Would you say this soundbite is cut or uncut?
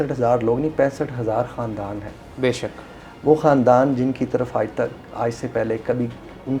uncut